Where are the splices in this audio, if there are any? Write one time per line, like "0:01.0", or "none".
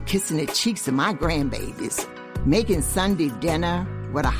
none